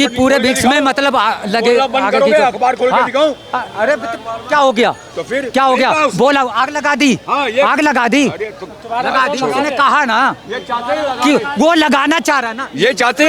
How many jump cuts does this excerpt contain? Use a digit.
0